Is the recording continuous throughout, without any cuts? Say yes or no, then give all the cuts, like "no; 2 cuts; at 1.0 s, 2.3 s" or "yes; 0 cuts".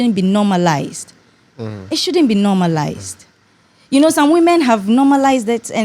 yes; 0 cuts